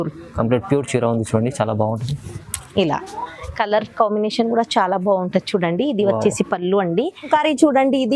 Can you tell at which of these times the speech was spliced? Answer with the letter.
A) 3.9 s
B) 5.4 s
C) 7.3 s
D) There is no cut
C